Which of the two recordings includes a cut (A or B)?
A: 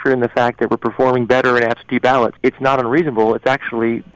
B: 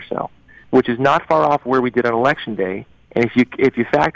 A